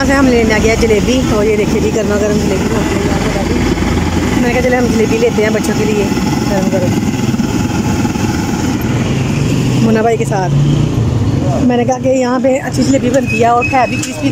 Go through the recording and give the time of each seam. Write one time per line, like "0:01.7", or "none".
none